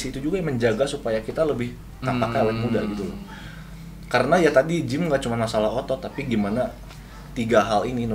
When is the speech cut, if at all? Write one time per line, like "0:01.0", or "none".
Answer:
none

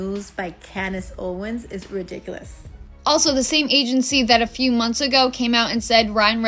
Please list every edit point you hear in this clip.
0:02.9

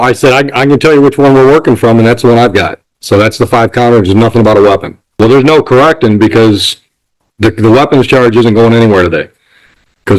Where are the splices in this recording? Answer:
0:05.0

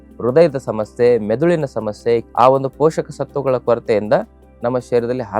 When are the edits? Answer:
0:02.3

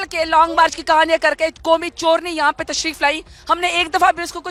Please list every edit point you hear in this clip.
none

